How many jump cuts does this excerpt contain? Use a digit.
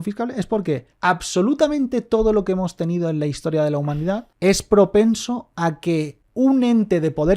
3